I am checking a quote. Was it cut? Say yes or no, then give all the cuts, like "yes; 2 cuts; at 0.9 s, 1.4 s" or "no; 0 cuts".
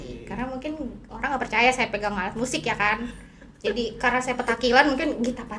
no; 0 cuts